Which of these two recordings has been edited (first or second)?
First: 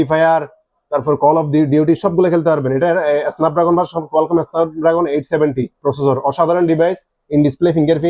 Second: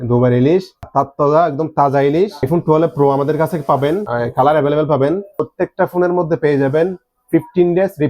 second